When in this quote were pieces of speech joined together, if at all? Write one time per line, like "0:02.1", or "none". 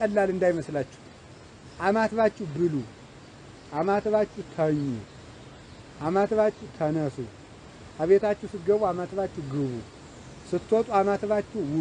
none